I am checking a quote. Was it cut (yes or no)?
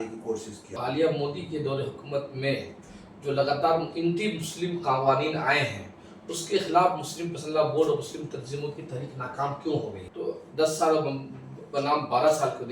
yes